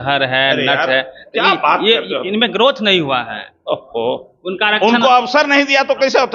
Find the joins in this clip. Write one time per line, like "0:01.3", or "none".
none